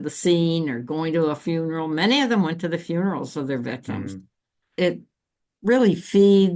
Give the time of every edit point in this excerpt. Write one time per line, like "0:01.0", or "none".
0:04.7